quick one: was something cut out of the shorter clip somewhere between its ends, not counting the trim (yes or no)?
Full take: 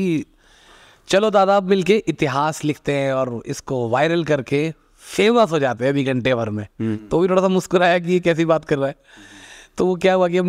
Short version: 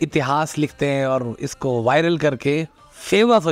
no